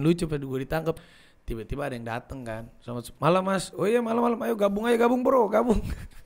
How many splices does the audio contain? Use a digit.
1